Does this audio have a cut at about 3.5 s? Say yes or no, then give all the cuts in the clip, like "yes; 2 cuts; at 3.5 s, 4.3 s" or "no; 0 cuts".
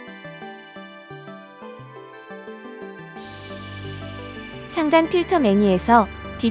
no; 1 cut; at 4.7 s